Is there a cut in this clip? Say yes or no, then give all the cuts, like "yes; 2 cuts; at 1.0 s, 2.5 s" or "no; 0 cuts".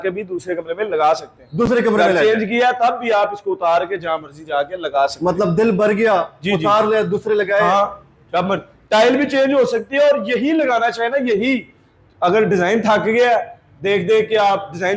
no; 0 cuts